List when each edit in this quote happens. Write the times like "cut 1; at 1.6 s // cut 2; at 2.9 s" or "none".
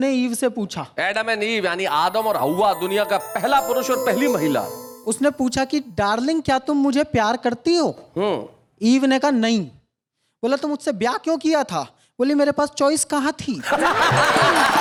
none